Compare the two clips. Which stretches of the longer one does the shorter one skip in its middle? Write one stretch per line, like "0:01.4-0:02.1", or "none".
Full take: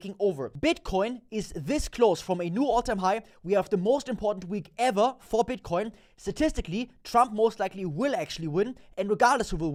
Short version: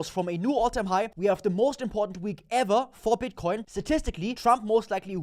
0:03.2-0:03.4
0:06.2-0:06.7